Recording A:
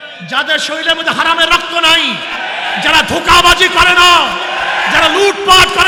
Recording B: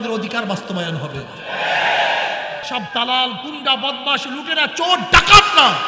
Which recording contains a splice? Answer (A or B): B